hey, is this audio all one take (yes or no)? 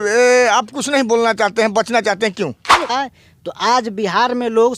no